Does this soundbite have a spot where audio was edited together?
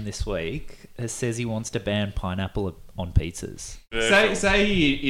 yes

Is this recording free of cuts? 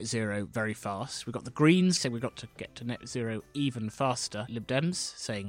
no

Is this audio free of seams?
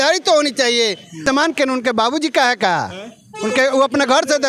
no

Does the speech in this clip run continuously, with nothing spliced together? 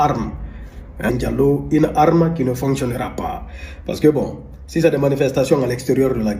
no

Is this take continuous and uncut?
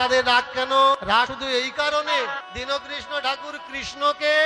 no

